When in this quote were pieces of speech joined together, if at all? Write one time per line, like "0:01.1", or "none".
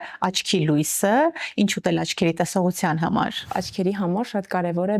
0:03.5